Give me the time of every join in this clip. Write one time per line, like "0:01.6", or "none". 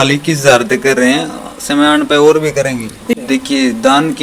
0:03.1